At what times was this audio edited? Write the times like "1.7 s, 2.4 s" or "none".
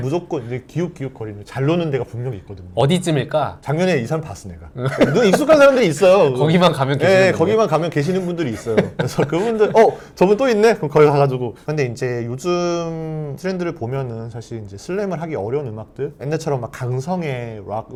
none